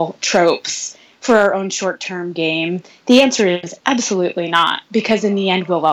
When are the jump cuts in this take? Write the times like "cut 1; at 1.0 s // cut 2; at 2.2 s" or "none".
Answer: none